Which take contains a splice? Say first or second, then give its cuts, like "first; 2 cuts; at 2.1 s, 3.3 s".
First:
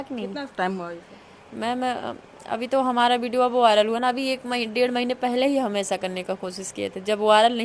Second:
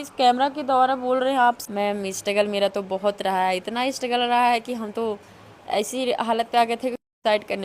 second; 1 cut; at 1.6 s